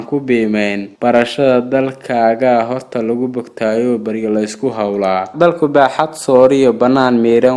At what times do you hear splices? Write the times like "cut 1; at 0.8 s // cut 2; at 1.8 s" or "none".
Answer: cut 1; at 5.3 s